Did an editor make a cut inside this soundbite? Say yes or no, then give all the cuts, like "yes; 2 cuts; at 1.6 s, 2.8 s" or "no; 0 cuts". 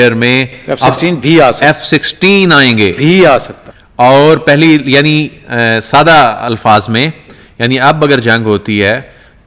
no; 0 cuts